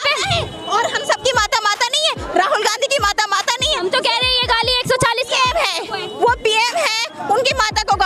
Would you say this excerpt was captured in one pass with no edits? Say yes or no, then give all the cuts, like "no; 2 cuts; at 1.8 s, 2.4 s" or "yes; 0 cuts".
yes; 0 cuts